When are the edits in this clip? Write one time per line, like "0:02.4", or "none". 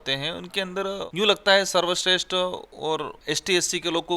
0:01.0
0:03.2